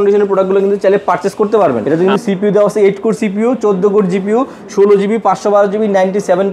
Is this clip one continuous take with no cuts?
no; 1 cut; at 1.9 s

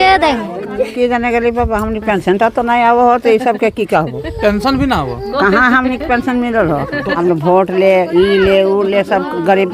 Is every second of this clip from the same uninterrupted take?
no; 2 cuts; at 0.9 s, 7.2 s

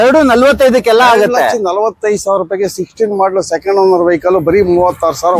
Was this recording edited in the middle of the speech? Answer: no; 0 cuts

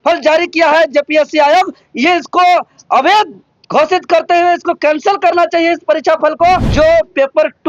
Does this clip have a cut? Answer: yes; 1 cut; at 6.7 s

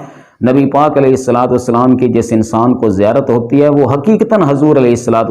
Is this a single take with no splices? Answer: yes; 0 cuts

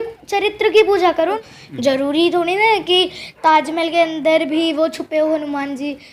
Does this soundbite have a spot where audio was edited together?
yes; 1 cut; at 1.4 s

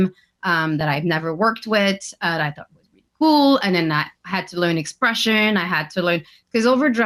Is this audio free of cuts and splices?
yes; 0 cuts

